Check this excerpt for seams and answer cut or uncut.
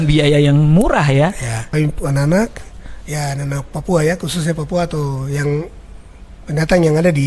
cut